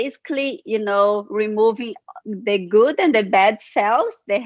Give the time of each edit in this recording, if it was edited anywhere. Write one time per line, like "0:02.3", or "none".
none